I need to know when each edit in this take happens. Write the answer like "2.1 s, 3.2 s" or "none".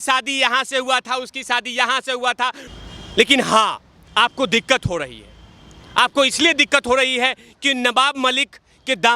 2.6 s